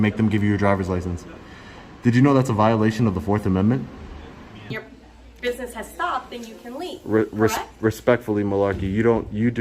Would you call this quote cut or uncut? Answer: cut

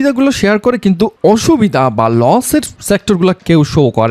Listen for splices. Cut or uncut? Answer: uncut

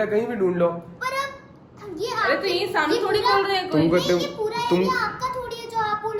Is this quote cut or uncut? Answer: uncut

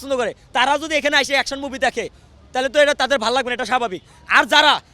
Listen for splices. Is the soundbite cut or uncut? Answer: uncut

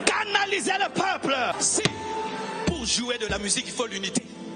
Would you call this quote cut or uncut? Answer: cut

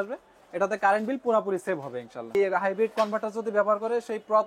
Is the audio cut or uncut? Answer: cut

